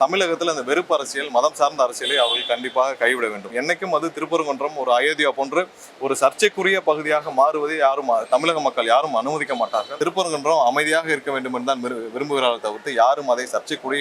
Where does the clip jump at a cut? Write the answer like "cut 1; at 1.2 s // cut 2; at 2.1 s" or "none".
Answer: cut 1; at 3.5 s // cut 2; at 9.9 s